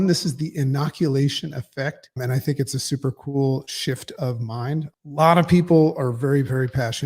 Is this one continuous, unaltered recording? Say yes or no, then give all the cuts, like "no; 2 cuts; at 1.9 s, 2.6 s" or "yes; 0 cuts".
no; 2 cuts; at 2.2 s, 4.9 s